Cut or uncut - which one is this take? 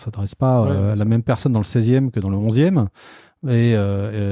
uncut